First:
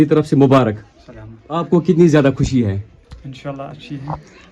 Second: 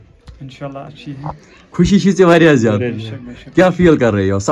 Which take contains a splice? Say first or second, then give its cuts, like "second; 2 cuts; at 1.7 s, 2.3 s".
first; 1 cut; at 1.6 s